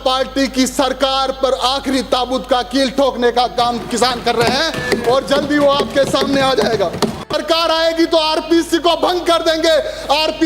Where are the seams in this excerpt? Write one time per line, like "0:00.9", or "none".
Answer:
0:07.4